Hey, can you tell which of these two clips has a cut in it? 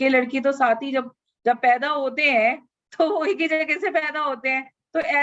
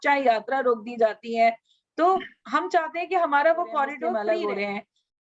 second; 1 cut; at 4.1 s

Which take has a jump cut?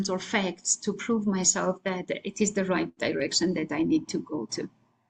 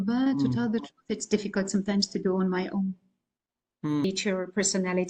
second; 1 cut; at 4.0 s

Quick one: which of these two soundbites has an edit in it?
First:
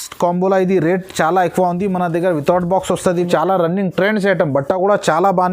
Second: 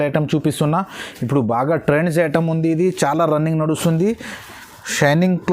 first; 1 cut; at 3.3 s

